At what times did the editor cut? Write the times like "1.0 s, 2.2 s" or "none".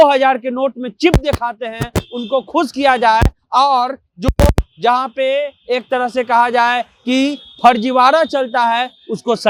none